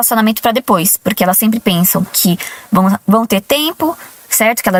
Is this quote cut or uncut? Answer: uncut